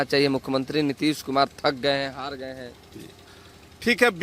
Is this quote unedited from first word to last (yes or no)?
yes